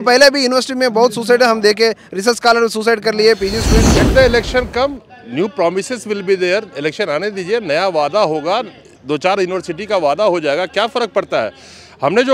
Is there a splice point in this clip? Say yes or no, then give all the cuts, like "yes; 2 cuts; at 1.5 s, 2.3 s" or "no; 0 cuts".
yes; 1 cut; at 4.0 s